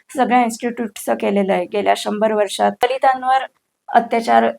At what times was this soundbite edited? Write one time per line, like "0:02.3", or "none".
0:02.8

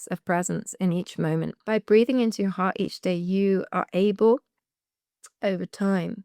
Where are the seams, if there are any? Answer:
0:01.6

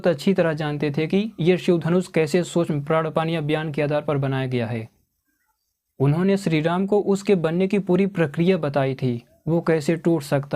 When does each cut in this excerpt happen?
none

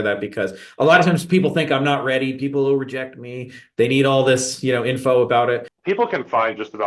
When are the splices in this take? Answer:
0:05.7

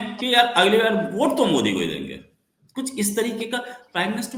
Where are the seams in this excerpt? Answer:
none

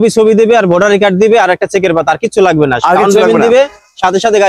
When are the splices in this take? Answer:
none

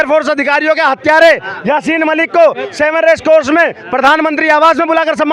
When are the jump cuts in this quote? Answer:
none

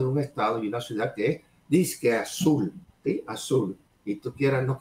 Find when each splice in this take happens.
0:02.9
0:03.9

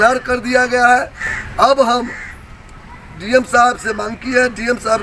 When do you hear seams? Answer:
0:01.5

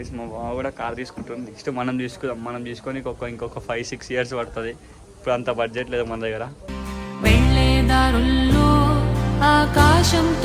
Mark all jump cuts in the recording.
none

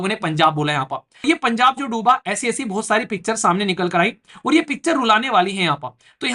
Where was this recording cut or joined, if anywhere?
0:01.2

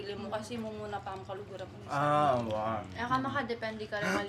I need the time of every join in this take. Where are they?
none

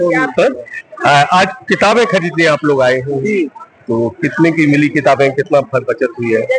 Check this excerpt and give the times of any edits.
none

